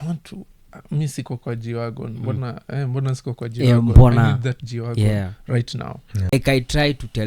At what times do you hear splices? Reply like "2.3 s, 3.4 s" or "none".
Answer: 6.2 s